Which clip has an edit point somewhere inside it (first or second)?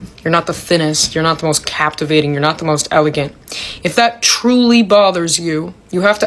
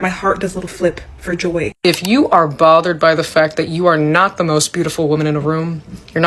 second